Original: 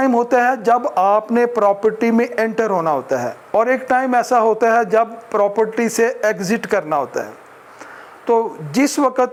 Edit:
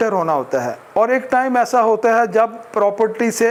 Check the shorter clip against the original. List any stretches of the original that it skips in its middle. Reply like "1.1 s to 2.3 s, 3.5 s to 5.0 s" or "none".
none